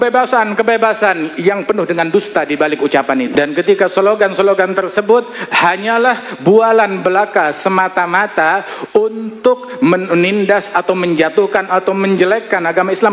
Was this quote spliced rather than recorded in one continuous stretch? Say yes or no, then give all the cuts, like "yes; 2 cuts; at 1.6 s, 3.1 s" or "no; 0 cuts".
yes; 1 cut; at 3.3 s